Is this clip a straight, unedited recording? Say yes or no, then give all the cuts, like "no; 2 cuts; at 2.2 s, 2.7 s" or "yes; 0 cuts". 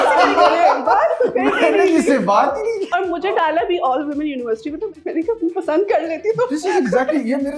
no; 2 cuts; at 2.9 s, 5.0 s